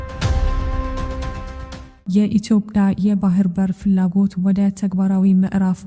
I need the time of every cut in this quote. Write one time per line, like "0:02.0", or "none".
none